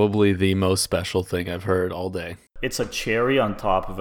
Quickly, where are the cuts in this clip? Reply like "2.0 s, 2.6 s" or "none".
2.4 s